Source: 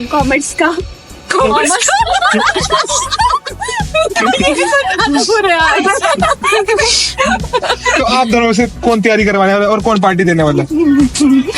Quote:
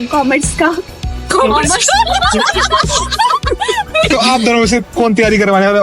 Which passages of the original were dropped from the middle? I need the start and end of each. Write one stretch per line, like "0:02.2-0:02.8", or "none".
0:04.1-0:08.0